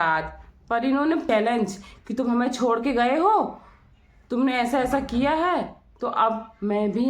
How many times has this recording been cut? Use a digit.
1